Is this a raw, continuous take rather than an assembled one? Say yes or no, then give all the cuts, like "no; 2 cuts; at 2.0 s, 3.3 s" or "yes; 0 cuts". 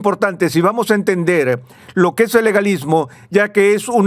yes; 0 cuts